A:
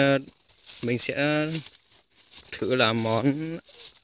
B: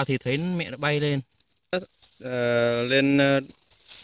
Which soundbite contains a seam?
B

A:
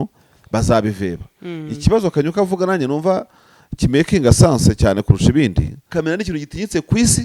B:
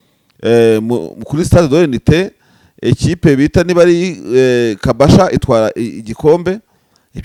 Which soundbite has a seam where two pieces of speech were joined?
A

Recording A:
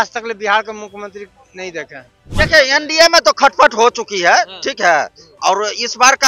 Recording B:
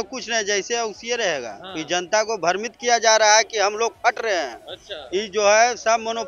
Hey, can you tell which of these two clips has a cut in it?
A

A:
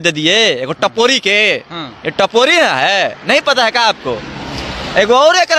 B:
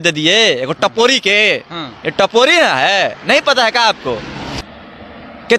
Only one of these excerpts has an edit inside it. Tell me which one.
B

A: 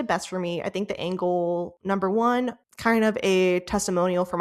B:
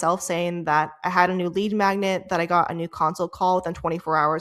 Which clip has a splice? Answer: A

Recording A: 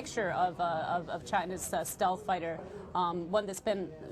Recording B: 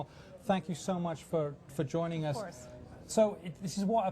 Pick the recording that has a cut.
B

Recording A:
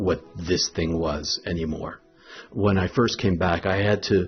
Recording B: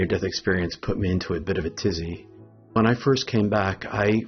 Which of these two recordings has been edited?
B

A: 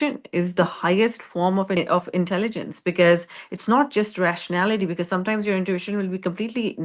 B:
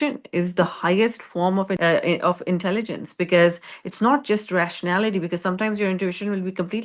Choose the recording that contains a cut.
A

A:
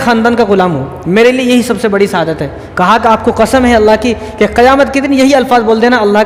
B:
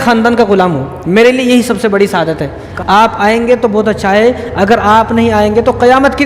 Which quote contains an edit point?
B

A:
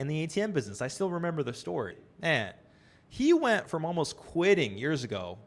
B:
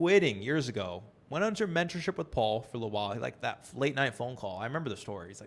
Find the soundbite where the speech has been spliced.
A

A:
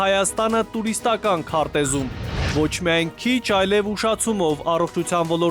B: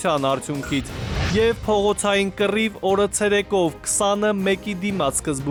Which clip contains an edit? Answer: A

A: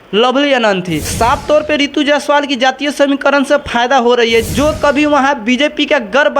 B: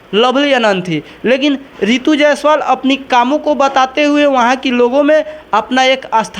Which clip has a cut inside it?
A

